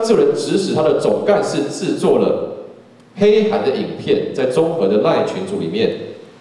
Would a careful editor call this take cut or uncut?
uncut